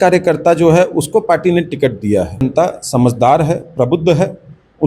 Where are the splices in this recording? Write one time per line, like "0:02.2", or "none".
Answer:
0:02.4